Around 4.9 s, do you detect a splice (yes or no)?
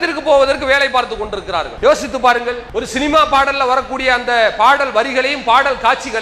no